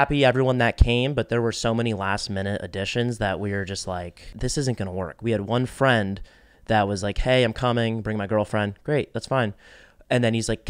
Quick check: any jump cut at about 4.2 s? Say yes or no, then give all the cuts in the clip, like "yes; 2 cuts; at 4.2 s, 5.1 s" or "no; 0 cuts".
yes; 1 cut; at 4.2 s